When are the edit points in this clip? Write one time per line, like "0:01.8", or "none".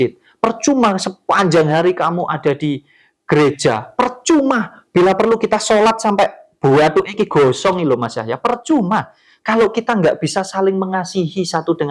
none